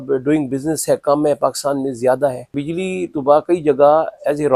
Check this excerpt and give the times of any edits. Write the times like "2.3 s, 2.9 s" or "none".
2.6 s